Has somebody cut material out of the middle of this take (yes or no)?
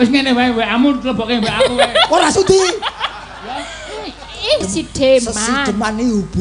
yes